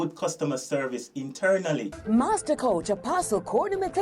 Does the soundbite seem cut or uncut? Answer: cut